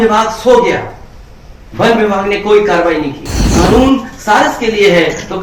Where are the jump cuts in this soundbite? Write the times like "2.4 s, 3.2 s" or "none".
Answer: 3.5 s